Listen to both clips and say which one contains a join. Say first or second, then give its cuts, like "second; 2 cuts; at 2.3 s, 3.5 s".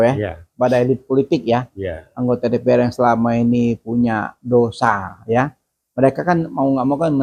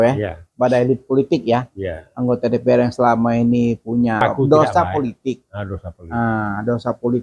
second; 1 cut; at 4.2 s